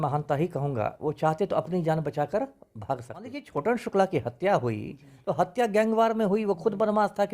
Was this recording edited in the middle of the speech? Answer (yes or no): yes